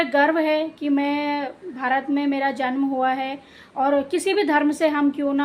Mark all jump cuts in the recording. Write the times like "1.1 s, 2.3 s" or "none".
none